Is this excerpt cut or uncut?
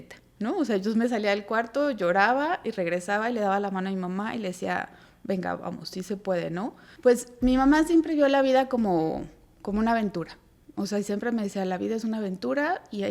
cut